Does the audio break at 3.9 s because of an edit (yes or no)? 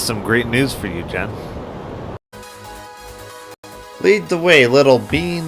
yes